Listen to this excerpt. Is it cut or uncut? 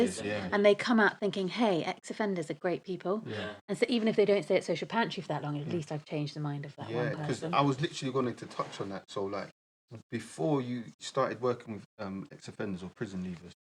uncut